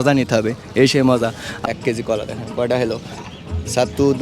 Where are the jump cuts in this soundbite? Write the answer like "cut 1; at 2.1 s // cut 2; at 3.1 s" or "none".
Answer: cut 1; at 1.6 s